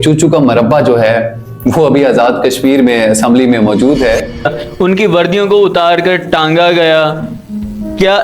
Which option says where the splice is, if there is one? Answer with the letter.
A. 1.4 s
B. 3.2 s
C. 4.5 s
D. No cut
C